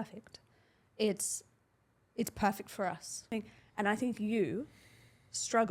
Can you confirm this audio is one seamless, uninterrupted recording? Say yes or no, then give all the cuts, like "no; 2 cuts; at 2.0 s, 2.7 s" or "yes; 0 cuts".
no; 1 cut; at 3.3 s